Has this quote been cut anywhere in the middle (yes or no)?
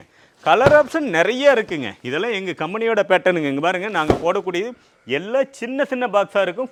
no